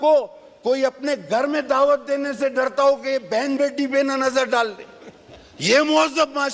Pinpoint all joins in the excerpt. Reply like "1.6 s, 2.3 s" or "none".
none